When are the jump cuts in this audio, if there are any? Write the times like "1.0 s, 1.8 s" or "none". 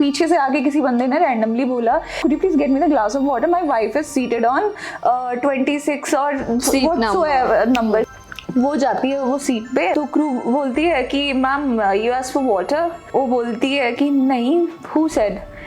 2.2 s, 8.1 s, 9.9 s, 13.0 s